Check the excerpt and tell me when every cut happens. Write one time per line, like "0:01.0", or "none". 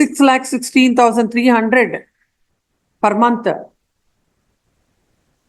none